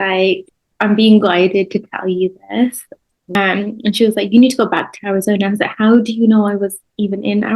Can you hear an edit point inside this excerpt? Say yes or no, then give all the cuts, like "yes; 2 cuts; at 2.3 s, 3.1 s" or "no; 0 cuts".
yes; 1 cut; at 3.3 s